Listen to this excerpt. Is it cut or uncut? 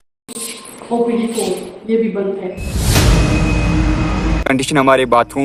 uncut